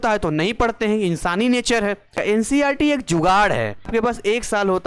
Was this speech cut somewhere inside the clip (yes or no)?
yes